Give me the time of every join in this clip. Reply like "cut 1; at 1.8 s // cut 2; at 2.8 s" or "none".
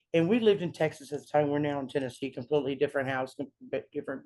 none

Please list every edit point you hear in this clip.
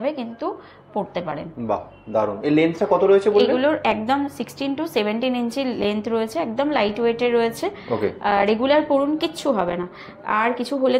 none

